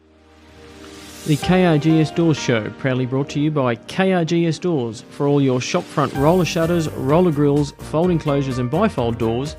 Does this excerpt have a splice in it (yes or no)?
yes